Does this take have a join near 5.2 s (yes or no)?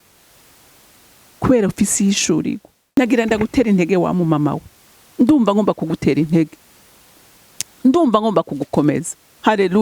no